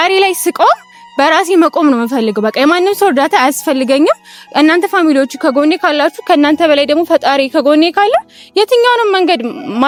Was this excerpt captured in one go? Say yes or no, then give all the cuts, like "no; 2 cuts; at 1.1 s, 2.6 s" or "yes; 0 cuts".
yes; 0 cuts